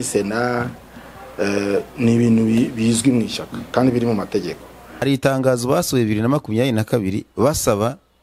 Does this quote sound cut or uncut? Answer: cut